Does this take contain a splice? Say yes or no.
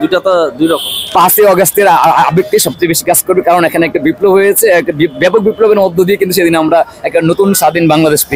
yes